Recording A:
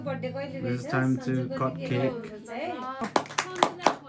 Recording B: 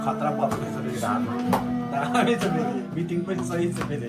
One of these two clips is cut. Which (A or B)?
A